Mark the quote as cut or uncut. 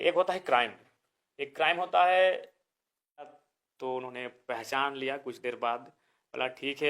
cut